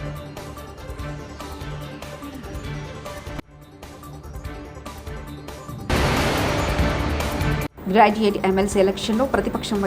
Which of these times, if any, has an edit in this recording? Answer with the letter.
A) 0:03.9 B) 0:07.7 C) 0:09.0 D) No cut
B